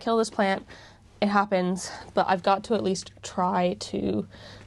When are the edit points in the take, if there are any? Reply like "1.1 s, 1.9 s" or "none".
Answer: none